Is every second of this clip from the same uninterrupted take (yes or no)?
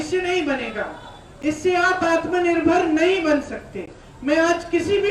yes